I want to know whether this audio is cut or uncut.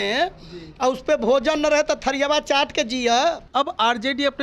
cut